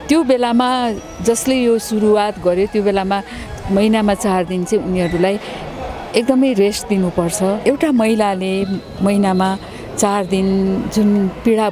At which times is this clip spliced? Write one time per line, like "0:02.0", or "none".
0:07.6